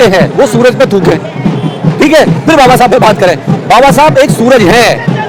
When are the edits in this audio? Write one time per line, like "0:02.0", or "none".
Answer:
none

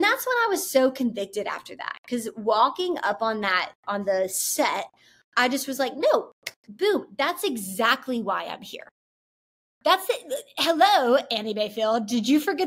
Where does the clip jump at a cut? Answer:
none

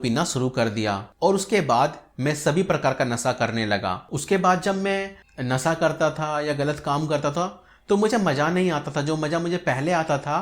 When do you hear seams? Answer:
0:04.1

